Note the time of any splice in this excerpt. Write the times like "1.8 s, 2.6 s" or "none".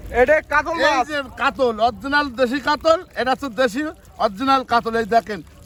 none

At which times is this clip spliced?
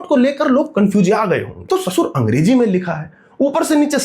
1.6 s

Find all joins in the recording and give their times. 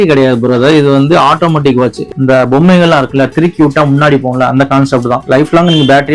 2.0 s, 5.2 s

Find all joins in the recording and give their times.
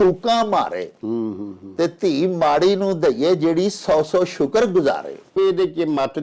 5.3 s

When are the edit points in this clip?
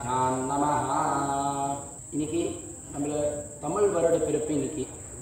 2.0 s

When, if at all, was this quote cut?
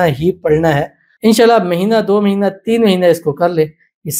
1.0 s

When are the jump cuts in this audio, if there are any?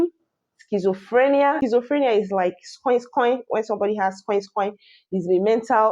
1.6 s

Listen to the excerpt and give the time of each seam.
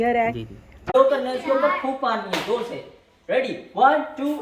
0.9 s

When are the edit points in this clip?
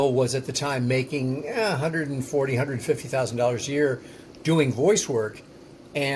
none

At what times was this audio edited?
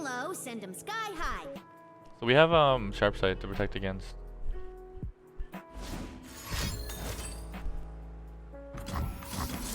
1.5 s

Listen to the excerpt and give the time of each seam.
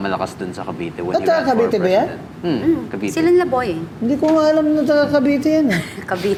none

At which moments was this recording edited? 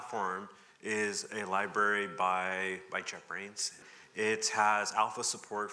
3.8 s

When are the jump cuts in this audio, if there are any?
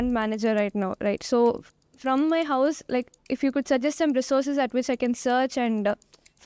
none

